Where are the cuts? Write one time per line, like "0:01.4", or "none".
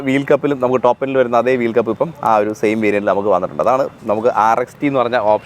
none